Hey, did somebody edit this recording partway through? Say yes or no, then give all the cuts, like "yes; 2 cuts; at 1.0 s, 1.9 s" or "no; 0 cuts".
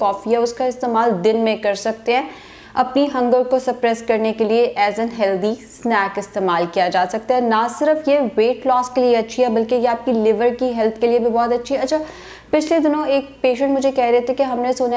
no; 0 cuts